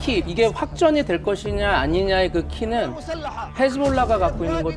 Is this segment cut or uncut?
uncut